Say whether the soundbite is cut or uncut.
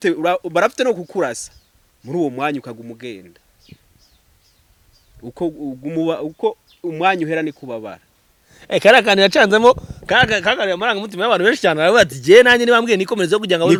uncut